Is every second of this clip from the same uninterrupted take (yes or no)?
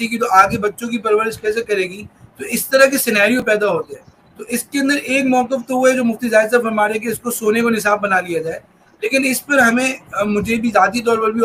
yes